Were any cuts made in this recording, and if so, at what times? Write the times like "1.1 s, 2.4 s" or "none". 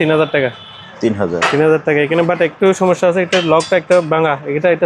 none